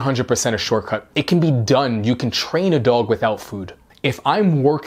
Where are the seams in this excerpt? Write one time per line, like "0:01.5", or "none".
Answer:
0:01.0
0:03.9